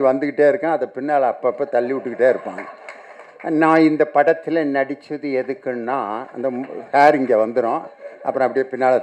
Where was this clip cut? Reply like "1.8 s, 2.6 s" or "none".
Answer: none